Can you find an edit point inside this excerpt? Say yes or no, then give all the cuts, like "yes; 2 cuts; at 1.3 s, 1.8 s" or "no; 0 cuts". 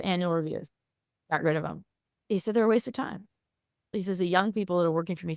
yes; 2 cuts; at 1.2 s, 3.9 s